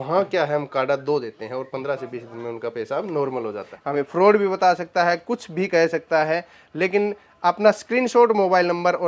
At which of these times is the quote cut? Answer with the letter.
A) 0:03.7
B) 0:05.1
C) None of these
A